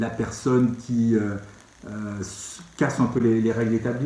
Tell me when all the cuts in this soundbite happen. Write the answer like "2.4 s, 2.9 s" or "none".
none